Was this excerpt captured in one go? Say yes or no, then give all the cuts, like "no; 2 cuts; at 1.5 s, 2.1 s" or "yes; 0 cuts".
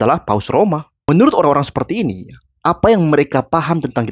no; 1 cut; at 0.9 s